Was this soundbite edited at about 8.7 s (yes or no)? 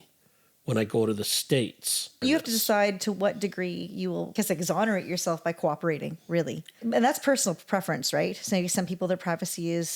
no